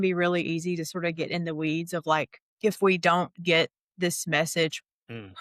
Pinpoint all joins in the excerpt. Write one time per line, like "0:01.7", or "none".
0:02.4